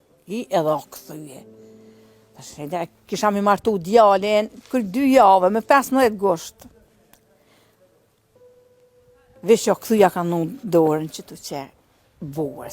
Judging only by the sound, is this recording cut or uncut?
cut